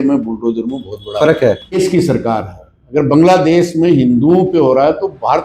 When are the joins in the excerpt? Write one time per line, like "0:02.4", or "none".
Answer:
0:01.8